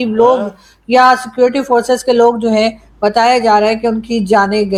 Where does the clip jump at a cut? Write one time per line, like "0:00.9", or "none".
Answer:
none